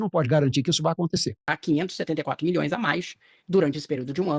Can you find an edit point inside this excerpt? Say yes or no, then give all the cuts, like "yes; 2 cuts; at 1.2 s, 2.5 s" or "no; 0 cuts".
yes; 1 cut; at 1.5 s